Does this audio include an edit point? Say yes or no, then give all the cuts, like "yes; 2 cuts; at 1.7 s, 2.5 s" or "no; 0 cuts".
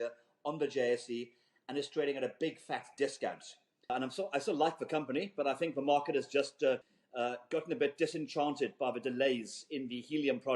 yes; 2 cuts; at 3.9 s, 7.0 s